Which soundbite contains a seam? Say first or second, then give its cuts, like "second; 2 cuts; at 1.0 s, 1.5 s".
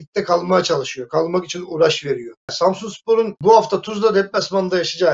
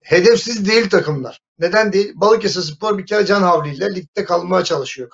first; 2 cuts; at 2.5 s, 3.4 s